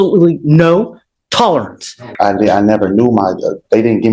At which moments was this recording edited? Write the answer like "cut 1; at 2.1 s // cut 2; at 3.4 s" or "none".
cut 1; at 2.1 s